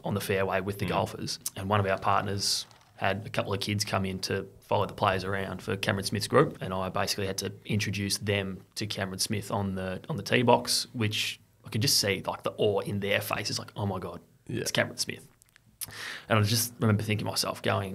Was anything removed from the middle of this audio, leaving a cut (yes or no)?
yes